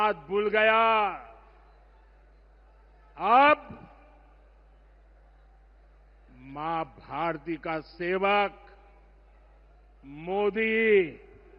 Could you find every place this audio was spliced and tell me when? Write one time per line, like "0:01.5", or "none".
none